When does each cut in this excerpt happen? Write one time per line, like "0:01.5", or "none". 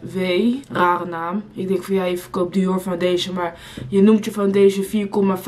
none